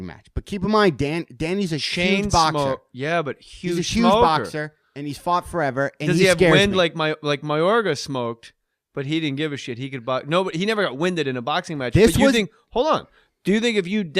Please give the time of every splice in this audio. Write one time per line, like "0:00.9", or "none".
0:10.1